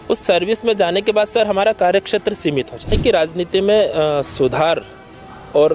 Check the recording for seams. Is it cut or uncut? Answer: cut